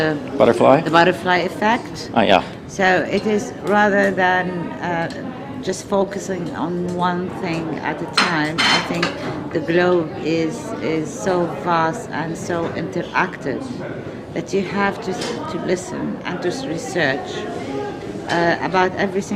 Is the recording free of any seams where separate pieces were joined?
no; 1 cut; at 7.3 s

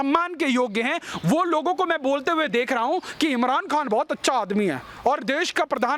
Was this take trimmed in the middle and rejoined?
no; 0 cuts

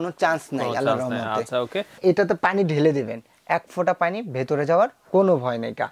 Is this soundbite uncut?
no; 1 cut; at 2.0 s

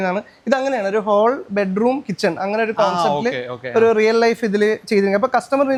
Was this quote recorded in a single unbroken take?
yes; 0 cuts

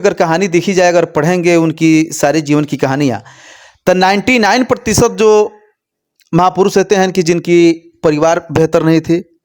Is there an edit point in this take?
no; 0 cuts

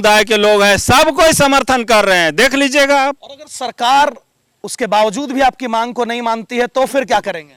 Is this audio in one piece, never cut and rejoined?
yes; 0 cuts

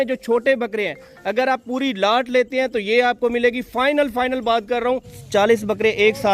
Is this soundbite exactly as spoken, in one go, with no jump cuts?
no; 1 cut; at 5.1 s

